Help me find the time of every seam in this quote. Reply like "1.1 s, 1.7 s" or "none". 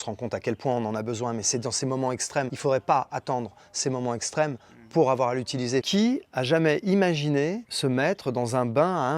2.5 s, 5.9 s